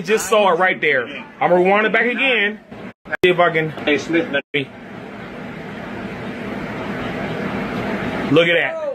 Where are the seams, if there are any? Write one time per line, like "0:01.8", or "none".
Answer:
0:03.7